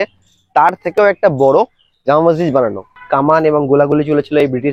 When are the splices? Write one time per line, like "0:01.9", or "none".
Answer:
0:03.0